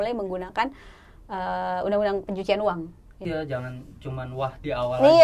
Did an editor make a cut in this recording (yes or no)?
yes